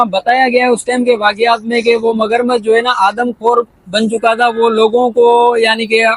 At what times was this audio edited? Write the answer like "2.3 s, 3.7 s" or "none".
none